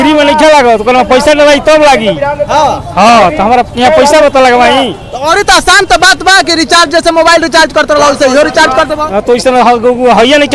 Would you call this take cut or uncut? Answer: uncut